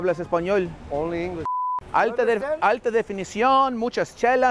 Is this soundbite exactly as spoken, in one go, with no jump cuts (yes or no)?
no